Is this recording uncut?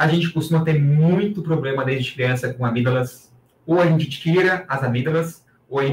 yes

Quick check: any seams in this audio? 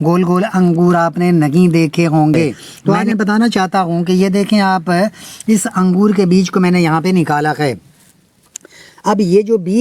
yes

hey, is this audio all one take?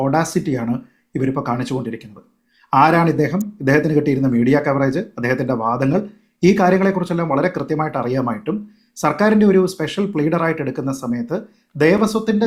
yes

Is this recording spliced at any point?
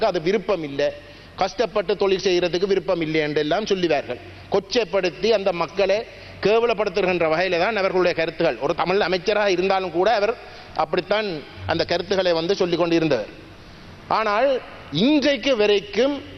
no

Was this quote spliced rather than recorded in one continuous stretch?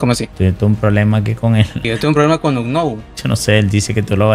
yes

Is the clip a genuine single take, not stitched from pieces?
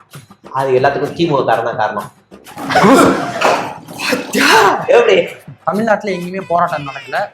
no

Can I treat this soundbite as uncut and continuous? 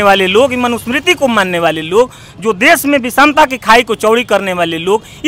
yes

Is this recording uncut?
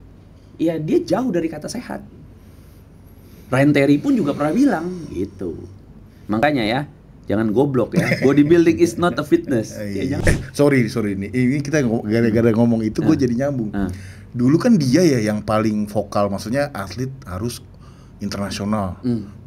no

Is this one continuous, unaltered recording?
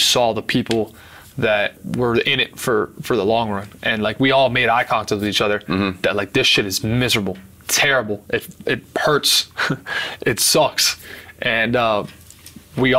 no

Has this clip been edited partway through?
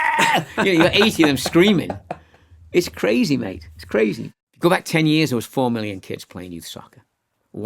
yes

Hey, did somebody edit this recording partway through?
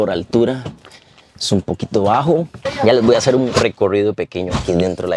yes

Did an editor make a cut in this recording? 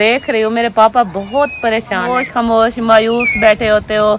yes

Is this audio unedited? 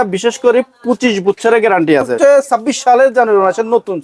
no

